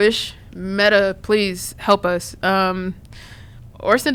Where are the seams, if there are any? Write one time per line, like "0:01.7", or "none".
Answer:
none